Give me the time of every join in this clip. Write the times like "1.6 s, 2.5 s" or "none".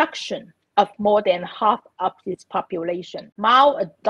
3.1 s